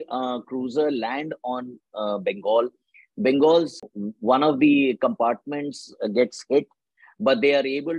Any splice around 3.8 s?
yes; 1 cut; at 3.8 s

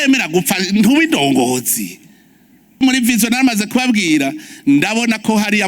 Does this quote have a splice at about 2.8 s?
yes; 1 cut; at 2.8 s

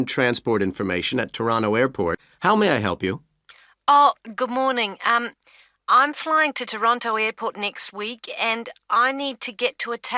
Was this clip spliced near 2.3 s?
yes; 1 cut; at 2.3 s

